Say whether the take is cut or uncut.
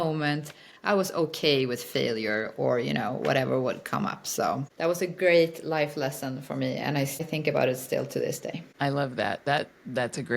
cut